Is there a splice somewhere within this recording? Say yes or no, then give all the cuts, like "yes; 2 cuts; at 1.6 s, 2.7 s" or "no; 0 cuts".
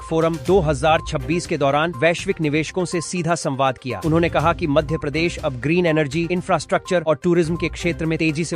no; 0 cuts